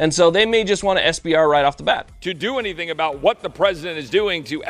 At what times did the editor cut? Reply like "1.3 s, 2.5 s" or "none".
2.1 s